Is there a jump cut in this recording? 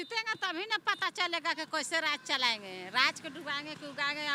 no; 0 cuts

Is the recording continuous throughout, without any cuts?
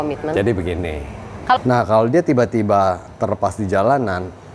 no; 1 cut; at 1.6 s

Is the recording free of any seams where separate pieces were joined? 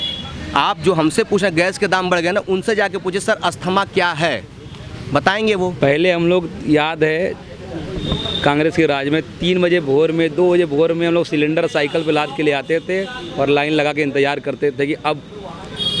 no; 1 cut; at 5.8 s

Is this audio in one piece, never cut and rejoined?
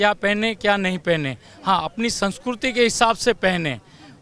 yes; 0 cuts

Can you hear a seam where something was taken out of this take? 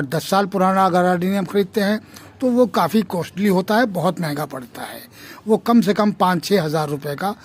no; 0 cuts

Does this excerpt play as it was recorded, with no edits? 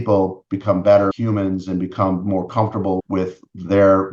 no; 2 cuts; at 1.1 s, 3.0 s

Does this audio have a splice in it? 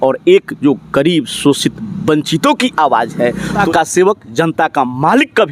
yes; 1 cut; at 3.6 s

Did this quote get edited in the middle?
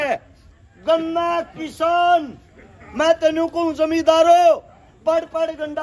no; 0 cuts

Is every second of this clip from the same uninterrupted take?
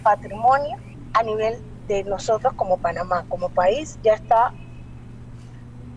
no; 1 cut; at 0.9 s

